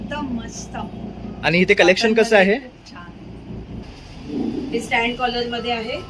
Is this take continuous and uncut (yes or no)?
no